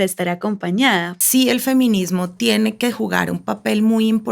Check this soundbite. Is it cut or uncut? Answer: cut